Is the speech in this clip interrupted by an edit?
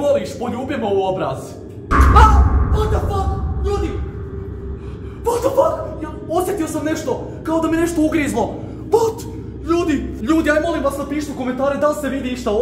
no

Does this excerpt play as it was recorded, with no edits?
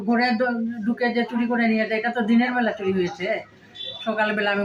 yes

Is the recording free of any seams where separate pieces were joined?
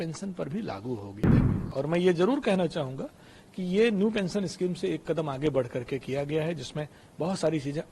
no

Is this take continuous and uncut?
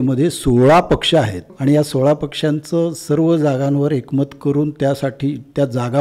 no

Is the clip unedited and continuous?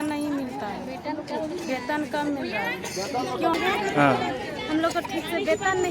no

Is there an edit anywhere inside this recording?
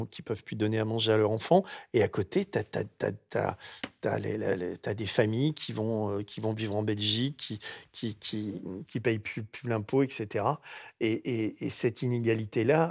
no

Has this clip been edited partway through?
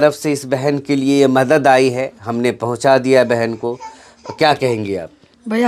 no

